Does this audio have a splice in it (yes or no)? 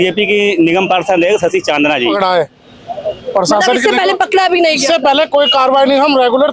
yes